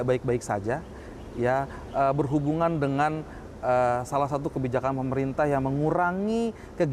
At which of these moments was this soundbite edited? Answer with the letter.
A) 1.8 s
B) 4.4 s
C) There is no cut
C